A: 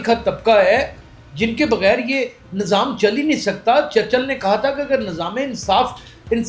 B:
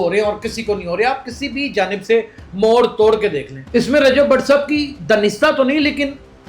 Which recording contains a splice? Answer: B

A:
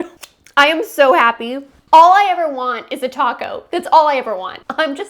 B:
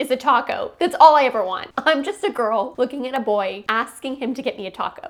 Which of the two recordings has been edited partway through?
A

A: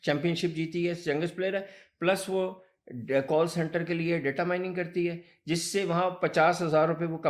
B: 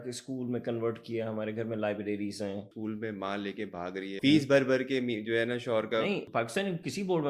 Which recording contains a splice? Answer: B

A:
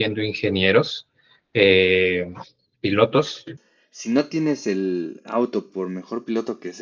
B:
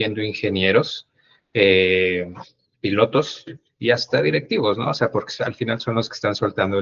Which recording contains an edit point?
A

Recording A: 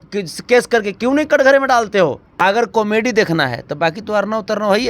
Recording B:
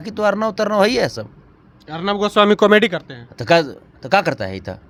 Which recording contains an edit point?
A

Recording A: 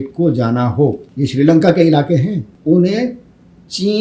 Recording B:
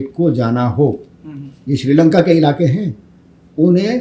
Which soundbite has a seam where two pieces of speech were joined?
A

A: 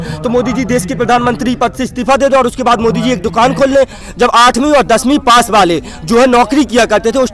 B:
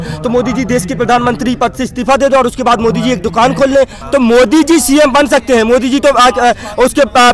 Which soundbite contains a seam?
A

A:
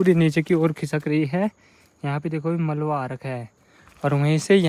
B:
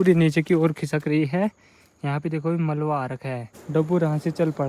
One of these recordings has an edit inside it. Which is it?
B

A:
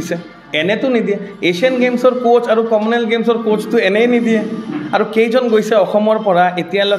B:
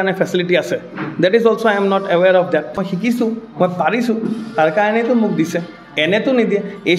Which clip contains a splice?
B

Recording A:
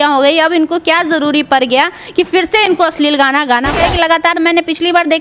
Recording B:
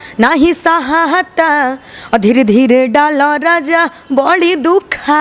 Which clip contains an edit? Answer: A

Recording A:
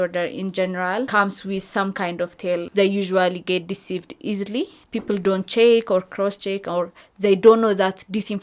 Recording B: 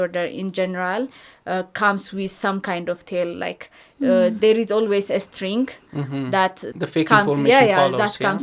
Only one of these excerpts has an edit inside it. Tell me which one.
A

